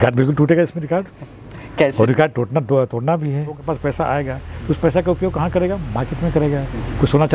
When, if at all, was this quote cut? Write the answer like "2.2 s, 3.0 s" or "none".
3.6 s